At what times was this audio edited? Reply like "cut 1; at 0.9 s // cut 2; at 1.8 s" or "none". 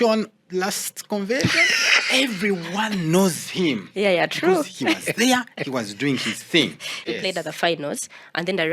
cut 1; at 7.1 s

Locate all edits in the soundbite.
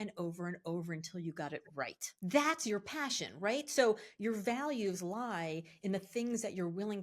cut 1; at 1.8 s

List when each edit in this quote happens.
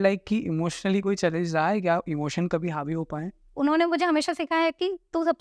cut 1; at 3.5 s

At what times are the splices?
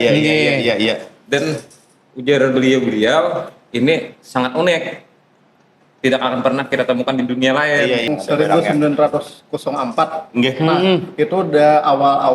cut 1; at 8.1 s

